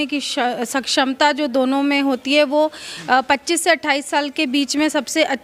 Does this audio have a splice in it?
no; 0 cuts

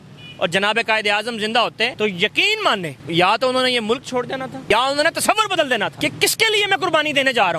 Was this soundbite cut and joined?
yes; 4 cuts; at 1.9 s, 3.0 s, 4.6 s, 5.9 s

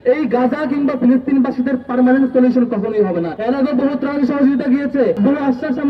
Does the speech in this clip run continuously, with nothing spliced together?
no; 2 cuts; at 3.3 s, 5.2 s

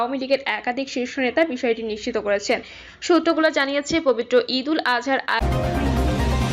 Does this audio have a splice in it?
yes; 1 cut; at 5.4 s

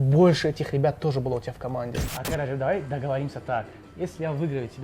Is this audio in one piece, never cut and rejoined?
no; 1 cut; at 2.1 s

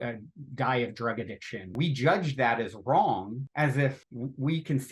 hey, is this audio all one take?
no; 3 cuts; at 1.7 s, 3.4 s, 4.1 s

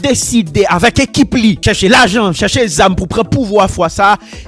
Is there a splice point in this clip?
yes; 1 cut; at 1.6 s

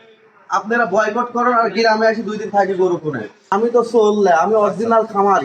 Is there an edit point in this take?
yes; 1 cut; at 3.5 s

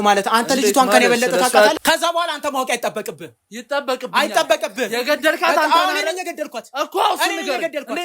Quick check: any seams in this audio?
yes; 1 cut; at 1.7 s

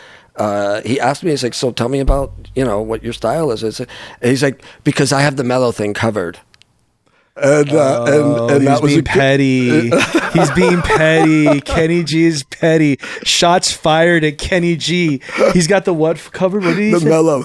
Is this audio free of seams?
yes; 0 cuts

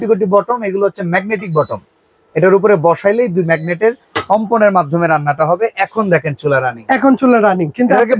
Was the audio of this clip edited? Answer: no; 0 cuts

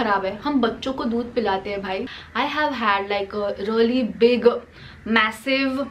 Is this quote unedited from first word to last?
no; 1 cut; at 2.2 s

